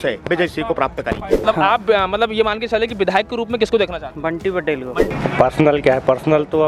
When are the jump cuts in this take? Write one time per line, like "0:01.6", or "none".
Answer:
0:01.4
0:05.2